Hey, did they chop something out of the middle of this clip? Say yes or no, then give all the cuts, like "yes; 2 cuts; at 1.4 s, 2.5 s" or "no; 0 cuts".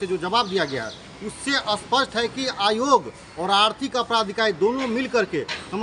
no; 0 cuts